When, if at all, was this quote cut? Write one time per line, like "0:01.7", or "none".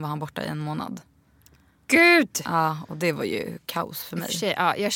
none